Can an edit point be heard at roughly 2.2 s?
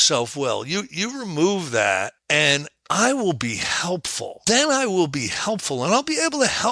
yes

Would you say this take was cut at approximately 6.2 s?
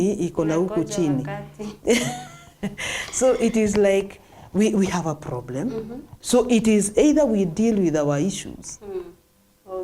yes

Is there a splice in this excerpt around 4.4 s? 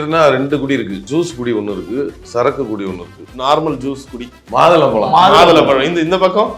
yes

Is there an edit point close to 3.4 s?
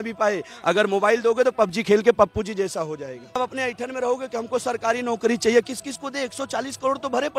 yes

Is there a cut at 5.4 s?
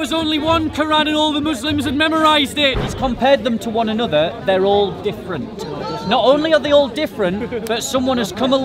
no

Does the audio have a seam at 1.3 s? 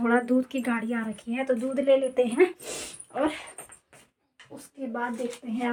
no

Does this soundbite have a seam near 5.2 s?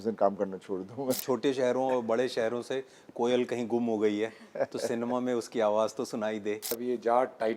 no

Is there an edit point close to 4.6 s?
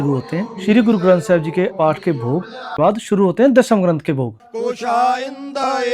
yes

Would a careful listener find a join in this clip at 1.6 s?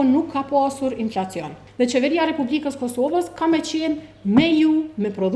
yes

